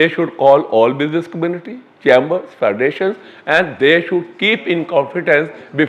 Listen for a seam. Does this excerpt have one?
no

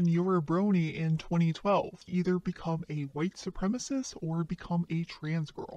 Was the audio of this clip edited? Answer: yes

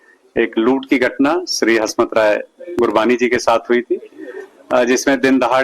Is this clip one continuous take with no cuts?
no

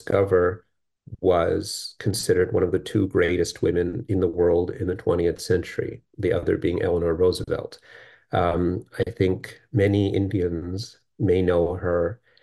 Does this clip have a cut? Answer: no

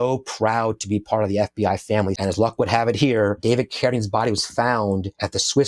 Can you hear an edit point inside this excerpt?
yes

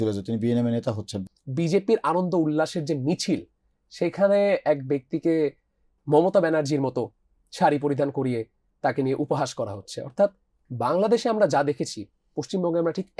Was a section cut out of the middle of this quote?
yes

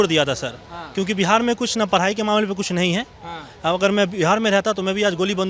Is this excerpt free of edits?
yes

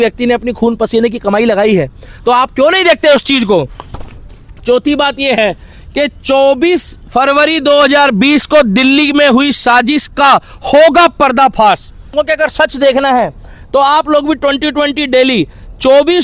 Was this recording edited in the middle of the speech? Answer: yes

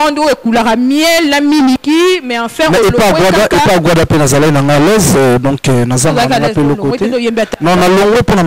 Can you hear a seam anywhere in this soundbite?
no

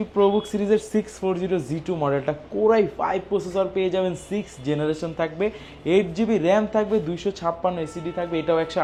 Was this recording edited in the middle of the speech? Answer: no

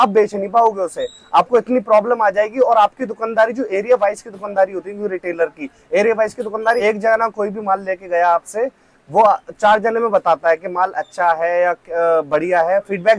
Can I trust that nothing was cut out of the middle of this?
yes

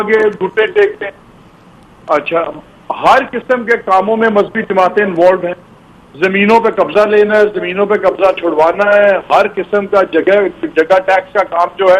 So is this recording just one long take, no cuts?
yes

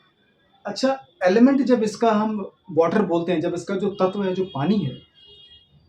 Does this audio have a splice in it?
no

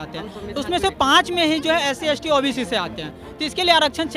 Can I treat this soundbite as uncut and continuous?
yes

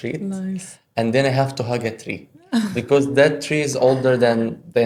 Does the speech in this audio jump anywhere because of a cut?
no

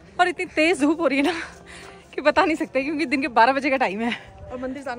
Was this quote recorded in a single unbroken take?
yes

